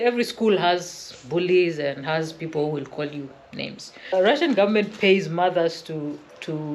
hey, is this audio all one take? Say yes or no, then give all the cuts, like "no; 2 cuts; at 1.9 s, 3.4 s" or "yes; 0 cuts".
no; 1 cut; at 4.1 s